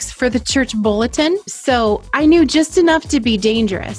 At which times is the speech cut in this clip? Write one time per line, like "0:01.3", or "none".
0:01.5